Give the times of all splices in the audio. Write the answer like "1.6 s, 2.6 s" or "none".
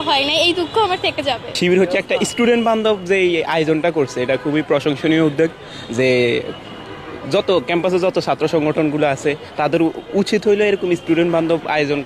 1.5 s